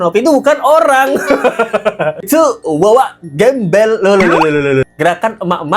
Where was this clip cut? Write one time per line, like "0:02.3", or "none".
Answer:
none